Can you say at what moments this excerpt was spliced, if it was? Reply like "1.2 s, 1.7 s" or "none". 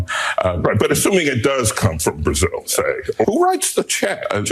3.2 s